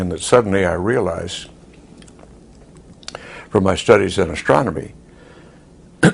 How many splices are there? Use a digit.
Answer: 1